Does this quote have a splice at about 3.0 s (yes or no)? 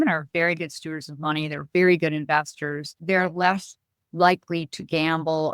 yes